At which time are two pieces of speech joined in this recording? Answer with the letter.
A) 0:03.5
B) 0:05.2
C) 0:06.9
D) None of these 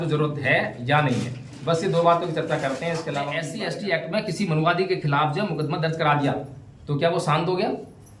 A